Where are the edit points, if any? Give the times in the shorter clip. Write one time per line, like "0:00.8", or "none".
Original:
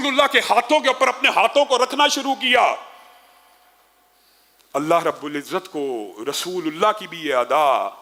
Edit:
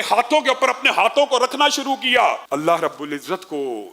0:02.4